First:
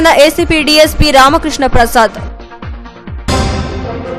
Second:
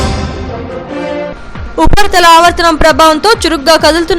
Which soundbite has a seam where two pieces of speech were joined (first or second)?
second